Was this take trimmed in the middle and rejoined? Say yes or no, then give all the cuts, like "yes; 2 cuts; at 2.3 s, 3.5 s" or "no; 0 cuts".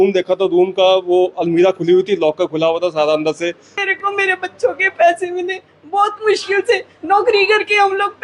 yes; 1 cut; at 3.8 s